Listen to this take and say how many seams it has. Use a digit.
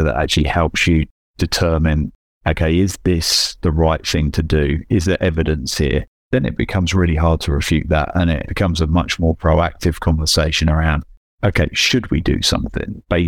1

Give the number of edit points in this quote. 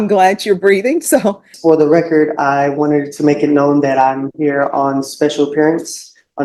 1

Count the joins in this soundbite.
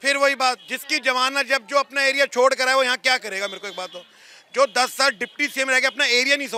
0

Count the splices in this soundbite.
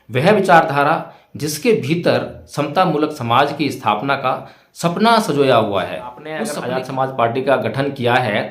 1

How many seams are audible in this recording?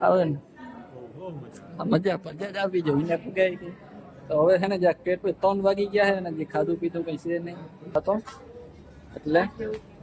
1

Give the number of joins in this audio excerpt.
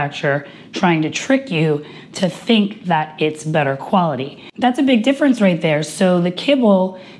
1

